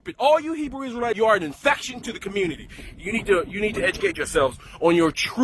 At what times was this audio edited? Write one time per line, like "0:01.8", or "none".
0:01.2